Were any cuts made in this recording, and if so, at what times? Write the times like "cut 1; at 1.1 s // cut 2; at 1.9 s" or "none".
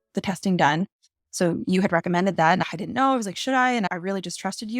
cut 1; at 2.6 s